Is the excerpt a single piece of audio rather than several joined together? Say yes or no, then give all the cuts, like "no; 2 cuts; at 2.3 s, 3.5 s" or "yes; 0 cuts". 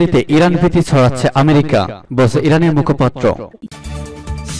no; 1 cut; at 3.6 s